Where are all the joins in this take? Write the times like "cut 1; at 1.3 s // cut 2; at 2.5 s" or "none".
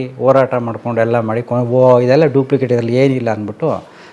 none